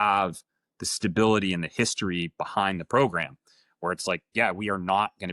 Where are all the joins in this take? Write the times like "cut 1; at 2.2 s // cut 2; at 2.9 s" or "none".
none